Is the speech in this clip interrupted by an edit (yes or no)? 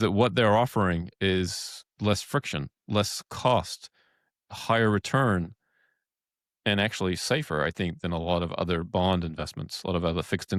no